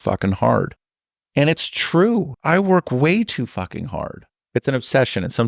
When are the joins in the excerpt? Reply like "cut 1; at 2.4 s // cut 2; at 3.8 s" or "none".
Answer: cut 1; at 2.4 s // cut 2; at 4.3 s